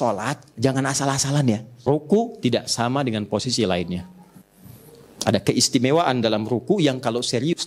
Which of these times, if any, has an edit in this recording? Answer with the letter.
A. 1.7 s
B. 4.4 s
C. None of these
A